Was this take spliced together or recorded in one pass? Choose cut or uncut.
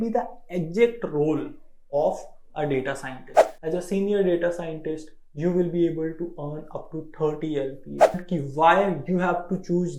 cut